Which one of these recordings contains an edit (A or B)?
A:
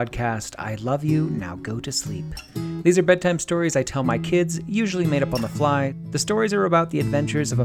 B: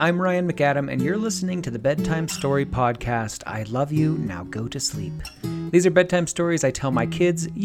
A